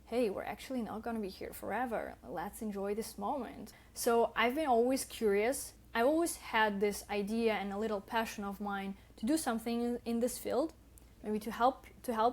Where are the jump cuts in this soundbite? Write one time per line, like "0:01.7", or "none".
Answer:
0:03.6
0:05.7